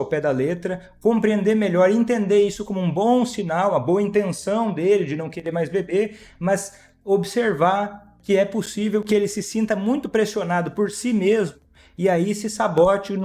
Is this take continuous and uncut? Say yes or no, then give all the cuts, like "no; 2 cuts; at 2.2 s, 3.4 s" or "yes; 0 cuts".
yes; 0 cuts